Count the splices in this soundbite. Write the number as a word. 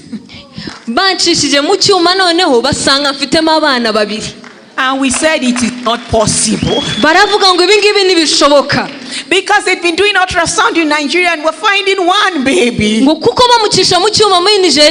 zero